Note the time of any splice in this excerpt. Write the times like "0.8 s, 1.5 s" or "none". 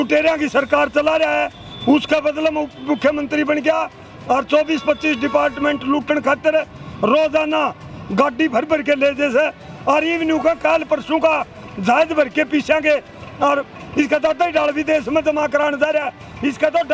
none